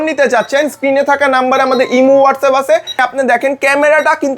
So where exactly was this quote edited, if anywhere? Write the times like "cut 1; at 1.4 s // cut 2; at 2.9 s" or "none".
cut 1; at 3.0 s